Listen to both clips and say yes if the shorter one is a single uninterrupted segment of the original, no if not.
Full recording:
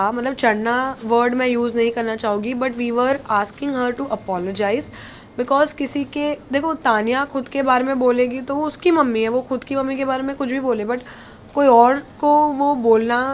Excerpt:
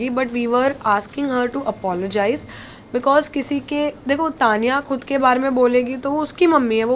yes